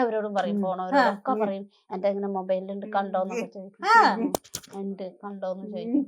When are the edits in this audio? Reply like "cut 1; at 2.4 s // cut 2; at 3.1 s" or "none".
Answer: none